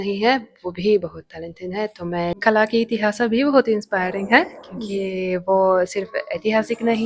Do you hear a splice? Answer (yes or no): yes